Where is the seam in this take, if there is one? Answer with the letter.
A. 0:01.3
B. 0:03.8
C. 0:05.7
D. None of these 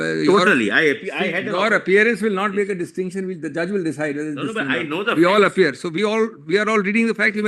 D